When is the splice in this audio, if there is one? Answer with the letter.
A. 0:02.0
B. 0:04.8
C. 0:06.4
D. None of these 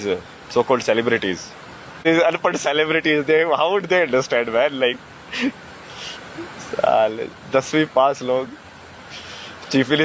A